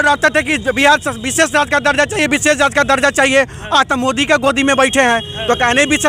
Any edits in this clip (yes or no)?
no